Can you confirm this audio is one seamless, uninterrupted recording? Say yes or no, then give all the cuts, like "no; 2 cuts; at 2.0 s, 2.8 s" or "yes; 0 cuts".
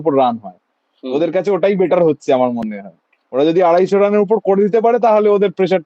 yes; 0 cuts